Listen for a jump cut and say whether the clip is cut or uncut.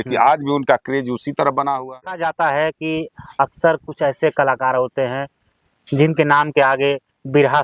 cut